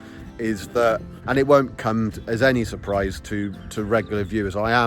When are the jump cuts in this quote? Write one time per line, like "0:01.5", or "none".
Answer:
0:01.2